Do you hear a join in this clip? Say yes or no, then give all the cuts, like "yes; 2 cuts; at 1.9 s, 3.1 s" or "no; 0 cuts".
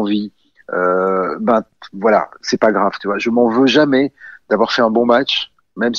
yes; 1 cut; at 2.4 s